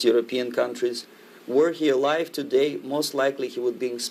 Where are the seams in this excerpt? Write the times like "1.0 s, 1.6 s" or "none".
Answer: none